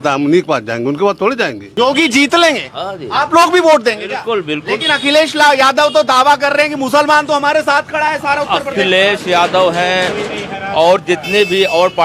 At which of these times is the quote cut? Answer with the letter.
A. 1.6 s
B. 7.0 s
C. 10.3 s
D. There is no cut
A